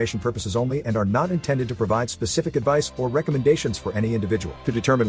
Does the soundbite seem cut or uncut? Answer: uncut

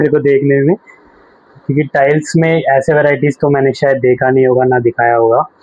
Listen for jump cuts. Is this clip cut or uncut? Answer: uncut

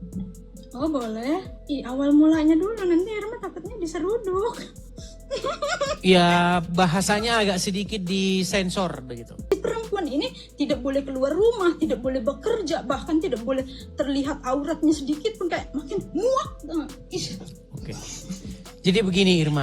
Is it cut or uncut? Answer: cut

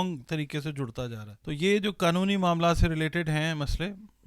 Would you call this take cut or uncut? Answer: cut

